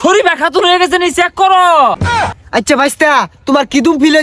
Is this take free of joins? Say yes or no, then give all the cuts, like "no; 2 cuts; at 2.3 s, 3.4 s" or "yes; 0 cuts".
no; 1 cut; at 2.3 s